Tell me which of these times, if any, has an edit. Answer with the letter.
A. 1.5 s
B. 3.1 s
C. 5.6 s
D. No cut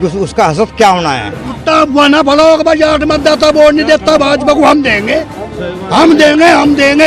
A